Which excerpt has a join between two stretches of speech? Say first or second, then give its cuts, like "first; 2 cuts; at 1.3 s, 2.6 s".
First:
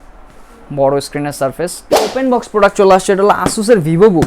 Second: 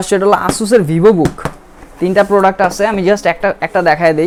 first; 1 cut; at 2.0 s